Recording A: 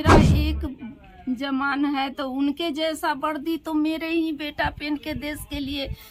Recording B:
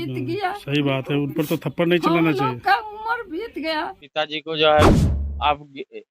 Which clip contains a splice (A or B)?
B